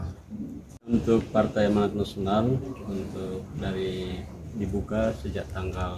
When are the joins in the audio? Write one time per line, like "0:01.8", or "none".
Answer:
0:01.0